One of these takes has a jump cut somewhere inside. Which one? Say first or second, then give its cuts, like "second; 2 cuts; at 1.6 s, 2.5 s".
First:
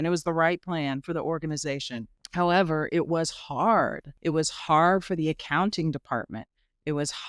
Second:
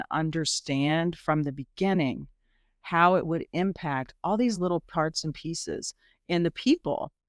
first; 2 cuts; at 2.2 s, 4.1 s